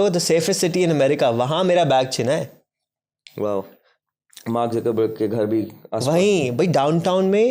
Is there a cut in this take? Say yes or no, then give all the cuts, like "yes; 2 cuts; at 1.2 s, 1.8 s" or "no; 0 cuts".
no; 0 cuts